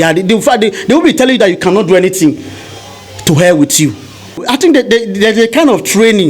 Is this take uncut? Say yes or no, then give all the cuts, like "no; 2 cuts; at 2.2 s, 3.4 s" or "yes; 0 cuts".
no; 1 cut; at 4.4 s